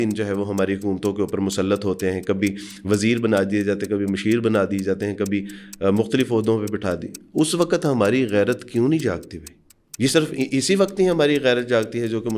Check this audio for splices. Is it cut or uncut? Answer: uncut